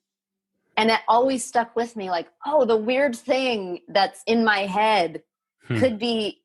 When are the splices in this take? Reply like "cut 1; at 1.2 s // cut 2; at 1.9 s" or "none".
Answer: none